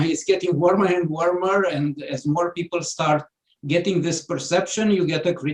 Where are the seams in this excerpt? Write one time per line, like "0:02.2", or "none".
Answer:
none